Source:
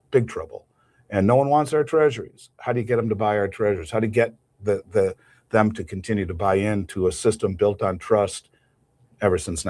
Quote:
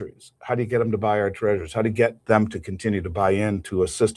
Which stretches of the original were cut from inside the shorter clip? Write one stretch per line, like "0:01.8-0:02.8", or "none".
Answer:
0:04.4-0:05.4